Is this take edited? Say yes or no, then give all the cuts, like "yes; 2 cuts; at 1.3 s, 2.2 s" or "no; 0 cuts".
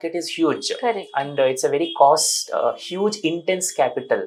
no; 0 cuts